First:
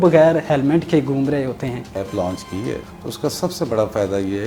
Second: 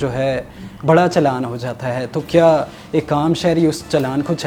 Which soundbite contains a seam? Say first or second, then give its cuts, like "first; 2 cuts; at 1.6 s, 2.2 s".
first; 2 cuts; at 1.9 s, 2.9 s